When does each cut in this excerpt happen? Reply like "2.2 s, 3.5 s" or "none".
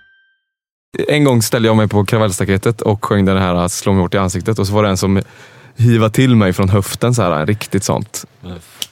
0.9 s